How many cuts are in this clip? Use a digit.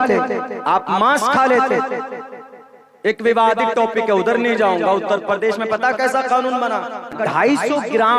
1